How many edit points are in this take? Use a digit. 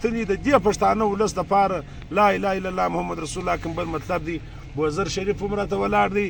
0